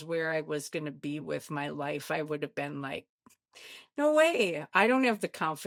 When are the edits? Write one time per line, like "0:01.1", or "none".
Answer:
none